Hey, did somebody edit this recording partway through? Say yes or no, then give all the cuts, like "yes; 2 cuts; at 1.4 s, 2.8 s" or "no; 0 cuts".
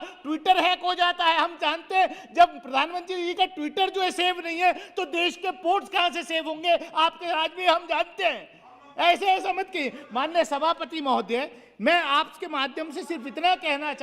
no; 0 cuts